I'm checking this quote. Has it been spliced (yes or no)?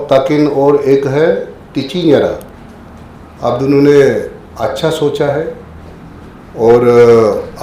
no